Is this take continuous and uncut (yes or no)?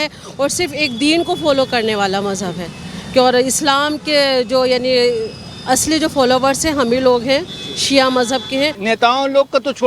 no